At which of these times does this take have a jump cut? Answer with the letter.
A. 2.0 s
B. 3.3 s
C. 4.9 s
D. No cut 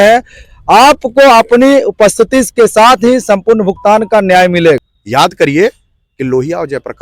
C